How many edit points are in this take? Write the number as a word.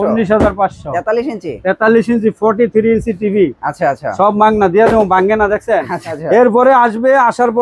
one